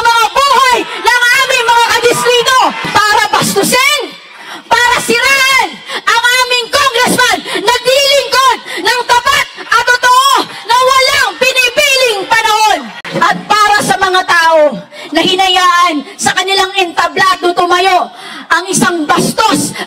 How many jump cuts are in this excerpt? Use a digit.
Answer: 2